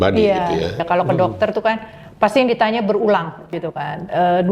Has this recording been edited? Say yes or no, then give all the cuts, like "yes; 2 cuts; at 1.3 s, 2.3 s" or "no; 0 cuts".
yes; 2 cuts; at 0.8 s, 3.5 s